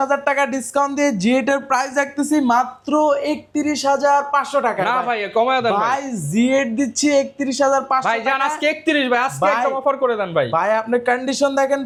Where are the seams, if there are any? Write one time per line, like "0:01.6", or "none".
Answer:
none